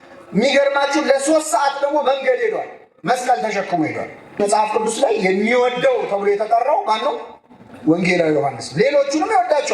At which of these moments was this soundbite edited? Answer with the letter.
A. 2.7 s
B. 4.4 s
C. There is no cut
B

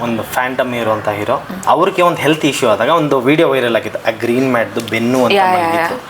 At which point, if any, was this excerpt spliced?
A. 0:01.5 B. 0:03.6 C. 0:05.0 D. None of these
A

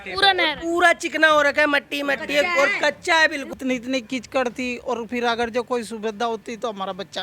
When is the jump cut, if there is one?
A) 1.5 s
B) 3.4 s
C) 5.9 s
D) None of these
B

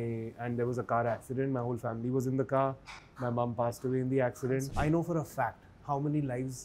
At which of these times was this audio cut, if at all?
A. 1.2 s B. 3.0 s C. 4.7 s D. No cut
C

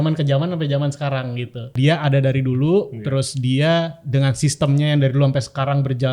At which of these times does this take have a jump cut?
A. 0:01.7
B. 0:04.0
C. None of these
A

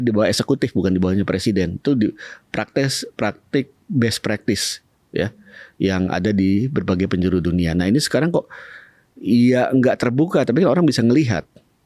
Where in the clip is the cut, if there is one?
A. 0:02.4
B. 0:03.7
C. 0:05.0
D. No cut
D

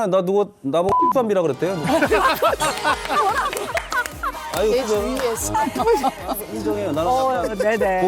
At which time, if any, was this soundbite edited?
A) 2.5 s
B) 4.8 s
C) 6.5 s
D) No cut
C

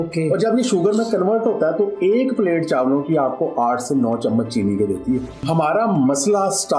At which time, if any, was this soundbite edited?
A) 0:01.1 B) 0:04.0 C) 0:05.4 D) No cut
C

